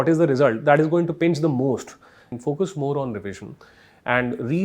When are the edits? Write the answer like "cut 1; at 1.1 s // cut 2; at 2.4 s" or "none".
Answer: cut 1; at 2.3 s